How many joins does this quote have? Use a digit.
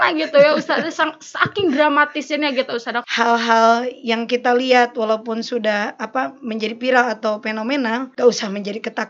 2